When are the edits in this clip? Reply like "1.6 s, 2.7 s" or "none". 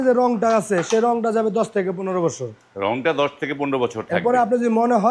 none